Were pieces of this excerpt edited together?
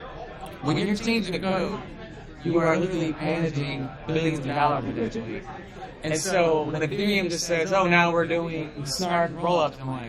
no; 0 cuts

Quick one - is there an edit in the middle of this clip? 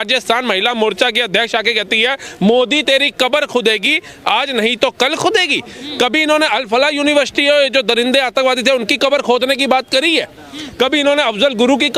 no; 0 cuts

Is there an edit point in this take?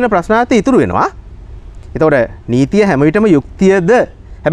no; 0 cuts

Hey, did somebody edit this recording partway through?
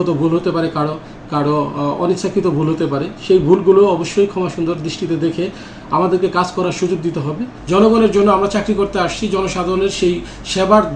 yes; 1 cut; at 7.5 s

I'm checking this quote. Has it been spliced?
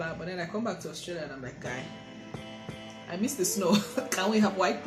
no; 0 cuts

